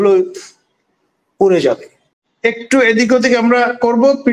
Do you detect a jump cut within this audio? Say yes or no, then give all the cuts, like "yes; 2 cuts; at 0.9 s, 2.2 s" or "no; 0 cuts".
yes; 1 cut; at 2.1 s